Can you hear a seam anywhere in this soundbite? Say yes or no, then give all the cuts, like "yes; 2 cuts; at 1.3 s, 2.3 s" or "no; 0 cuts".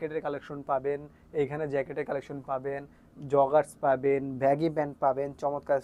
no; 0 cuts